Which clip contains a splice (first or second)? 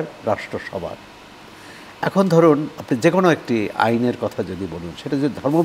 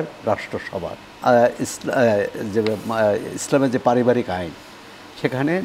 second